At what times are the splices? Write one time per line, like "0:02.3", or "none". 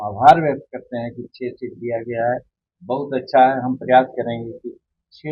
none